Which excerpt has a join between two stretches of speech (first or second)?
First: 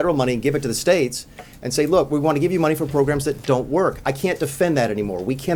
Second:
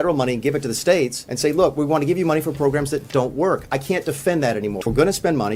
second